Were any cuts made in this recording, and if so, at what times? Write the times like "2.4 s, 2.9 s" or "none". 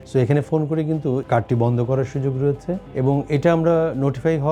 1.2 s, 2.9 s